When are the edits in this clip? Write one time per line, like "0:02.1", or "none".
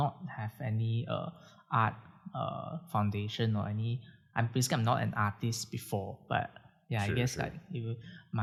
none